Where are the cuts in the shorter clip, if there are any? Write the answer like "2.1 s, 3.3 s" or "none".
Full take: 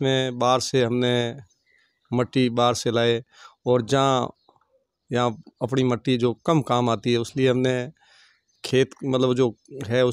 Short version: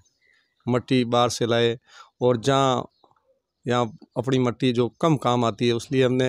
none